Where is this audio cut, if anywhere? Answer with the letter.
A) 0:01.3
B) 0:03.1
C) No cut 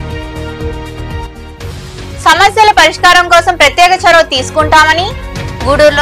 A